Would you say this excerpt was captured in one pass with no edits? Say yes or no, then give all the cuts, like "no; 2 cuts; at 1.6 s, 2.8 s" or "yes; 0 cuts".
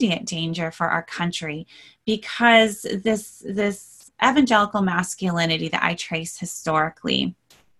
yes; 0 cuts